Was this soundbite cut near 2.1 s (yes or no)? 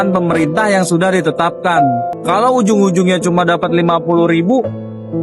yes